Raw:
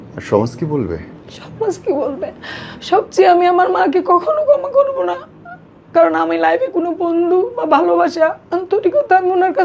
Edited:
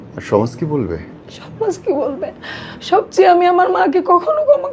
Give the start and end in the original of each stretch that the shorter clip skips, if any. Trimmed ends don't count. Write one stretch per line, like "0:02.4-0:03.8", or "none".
none

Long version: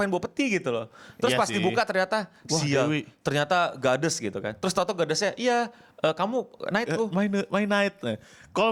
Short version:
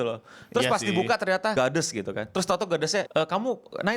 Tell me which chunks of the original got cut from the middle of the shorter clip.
0:02.2-0:03.8
0:05.4-0:06.0

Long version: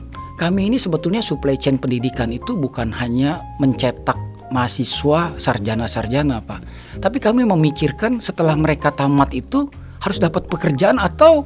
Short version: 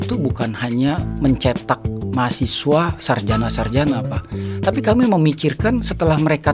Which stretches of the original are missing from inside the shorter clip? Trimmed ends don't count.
none

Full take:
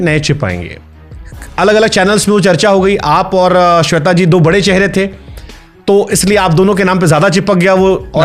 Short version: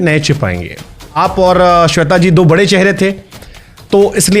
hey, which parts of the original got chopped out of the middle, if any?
0:01.1-0:03.1

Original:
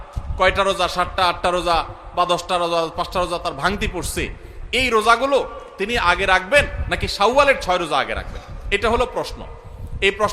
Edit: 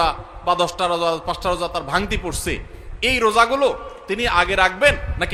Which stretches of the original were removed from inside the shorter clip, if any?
none

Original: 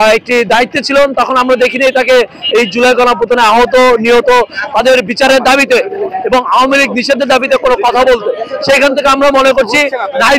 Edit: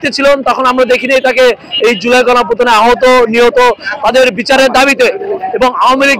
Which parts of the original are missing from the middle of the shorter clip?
none

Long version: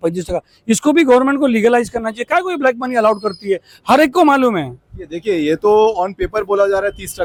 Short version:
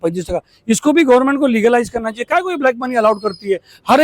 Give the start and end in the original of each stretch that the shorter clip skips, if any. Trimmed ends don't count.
none

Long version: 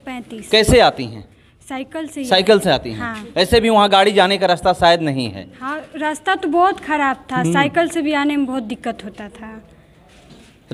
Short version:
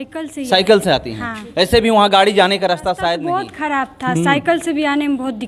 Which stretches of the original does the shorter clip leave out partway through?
0:05.0-0:06.5

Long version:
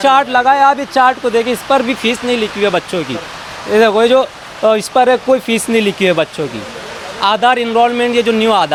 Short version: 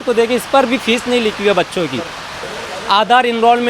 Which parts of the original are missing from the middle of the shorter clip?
0:03.5-0:06.7

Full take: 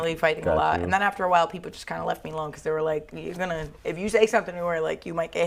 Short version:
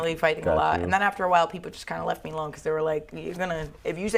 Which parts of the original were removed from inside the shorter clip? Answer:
none

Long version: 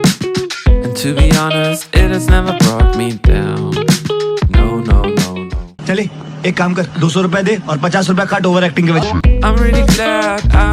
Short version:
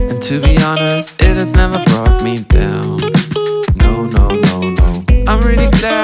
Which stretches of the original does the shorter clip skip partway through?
0:05.8-0:09.2

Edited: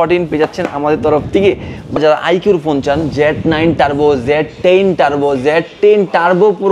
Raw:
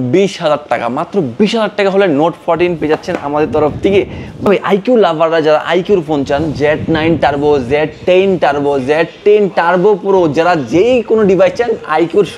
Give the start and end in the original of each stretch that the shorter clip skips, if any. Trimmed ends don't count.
0:04.5-0:05.4

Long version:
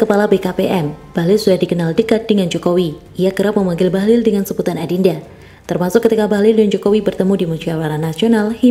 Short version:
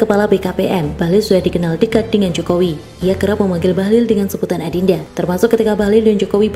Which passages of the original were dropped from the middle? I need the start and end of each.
0:00.9-0:01.1
0:05.3-0:05.6

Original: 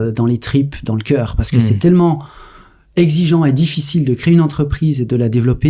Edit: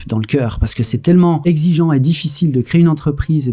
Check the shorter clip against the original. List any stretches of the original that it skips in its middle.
0:02.2-0:02.9

